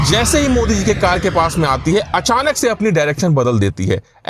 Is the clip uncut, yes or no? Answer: yes